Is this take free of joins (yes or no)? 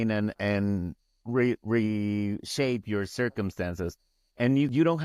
yes